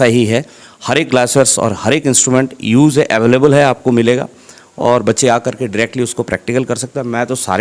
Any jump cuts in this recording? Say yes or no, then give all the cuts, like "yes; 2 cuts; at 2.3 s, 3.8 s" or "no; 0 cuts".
no; 0 cuts